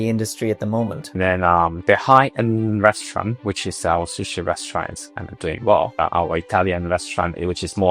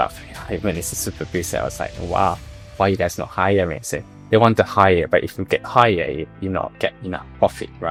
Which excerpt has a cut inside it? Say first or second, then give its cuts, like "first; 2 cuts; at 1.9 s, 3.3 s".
first; 2 cuts; at 1.2 s, 6.0 s